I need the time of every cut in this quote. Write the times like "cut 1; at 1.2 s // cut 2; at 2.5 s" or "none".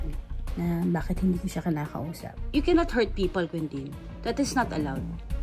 cut 1; at 2.4 s